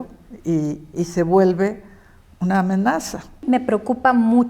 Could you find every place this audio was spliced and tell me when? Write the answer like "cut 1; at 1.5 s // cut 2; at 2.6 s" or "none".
cut 1; at 3.4 s